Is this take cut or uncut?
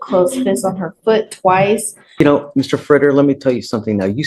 cut